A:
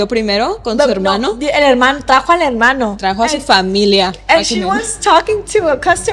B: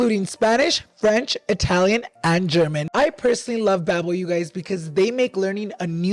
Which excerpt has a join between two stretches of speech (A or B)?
B